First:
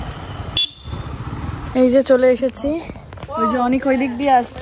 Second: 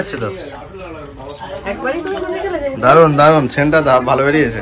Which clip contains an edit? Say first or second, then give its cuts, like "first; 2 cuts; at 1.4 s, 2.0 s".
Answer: first; 1 cut; at 1.7 s